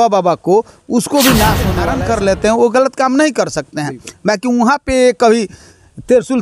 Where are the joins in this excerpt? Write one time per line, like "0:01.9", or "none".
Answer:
0:01.7